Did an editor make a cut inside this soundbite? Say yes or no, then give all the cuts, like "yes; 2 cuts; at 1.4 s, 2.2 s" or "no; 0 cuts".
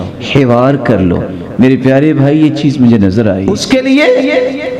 yes; 1 cut; at 3.5 s